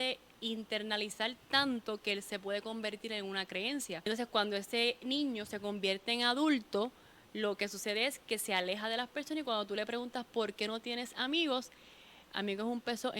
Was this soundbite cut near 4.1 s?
yes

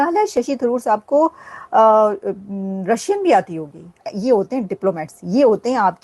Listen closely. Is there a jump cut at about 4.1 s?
yes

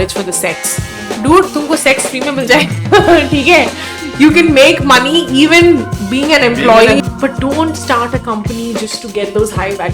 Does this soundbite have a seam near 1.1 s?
yes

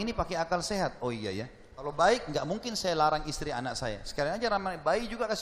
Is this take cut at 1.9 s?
yes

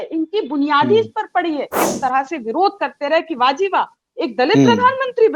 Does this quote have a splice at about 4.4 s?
no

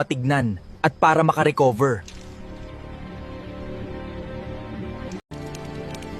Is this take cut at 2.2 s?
no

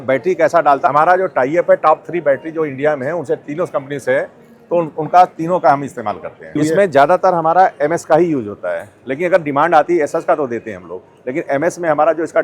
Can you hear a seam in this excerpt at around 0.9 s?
yes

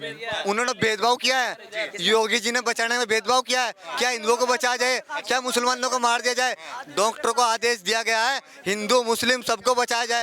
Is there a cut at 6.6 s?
no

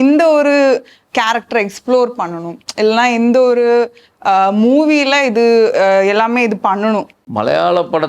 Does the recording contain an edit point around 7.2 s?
yes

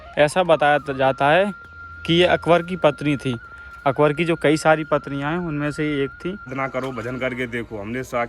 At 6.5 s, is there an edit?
yes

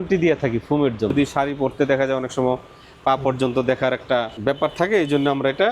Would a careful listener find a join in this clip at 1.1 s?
yes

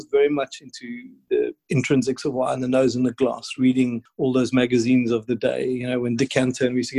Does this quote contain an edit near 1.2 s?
yes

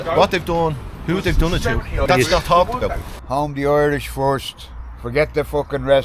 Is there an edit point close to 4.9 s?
no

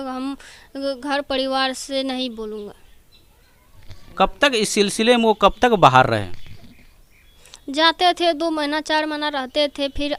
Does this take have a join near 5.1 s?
no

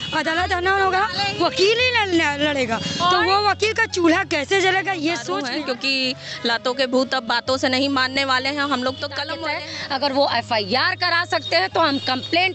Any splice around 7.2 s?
no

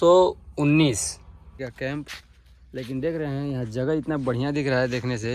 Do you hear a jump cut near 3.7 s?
no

